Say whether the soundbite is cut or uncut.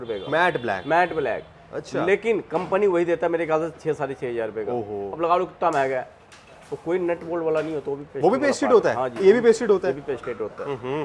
uncut